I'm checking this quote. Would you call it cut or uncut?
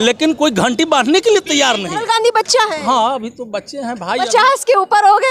cut